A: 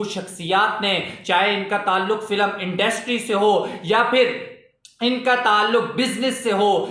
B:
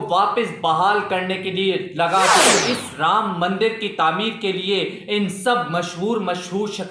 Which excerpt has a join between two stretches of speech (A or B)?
B